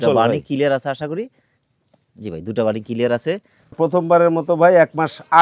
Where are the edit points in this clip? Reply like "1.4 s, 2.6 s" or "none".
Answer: 3.8 s